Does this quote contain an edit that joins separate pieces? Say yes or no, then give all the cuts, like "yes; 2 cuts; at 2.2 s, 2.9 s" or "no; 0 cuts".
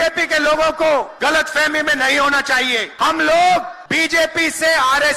yes; 3 cuts; at 1.1 s, 2.9 s, 3.8 s